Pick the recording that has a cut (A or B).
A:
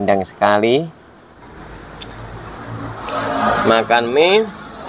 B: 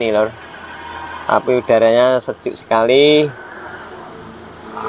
A